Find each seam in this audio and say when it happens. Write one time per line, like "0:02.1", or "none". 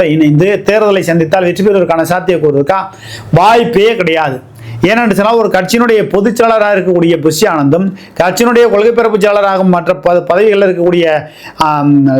none